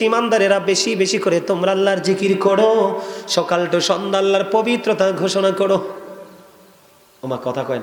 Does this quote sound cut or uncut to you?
uncut